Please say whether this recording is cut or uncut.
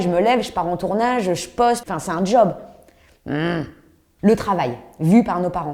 uncut